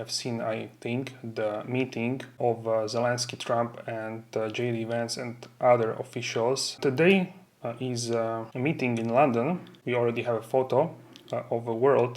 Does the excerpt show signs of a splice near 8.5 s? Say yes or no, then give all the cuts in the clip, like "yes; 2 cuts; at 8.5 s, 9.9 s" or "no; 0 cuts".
yes; 4 cuts; at 2.3 s, 6.8 s, 8.5 s, 9.7 s